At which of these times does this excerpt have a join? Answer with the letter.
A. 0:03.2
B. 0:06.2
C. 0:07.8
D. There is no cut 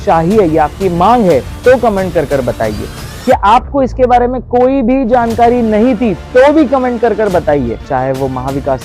C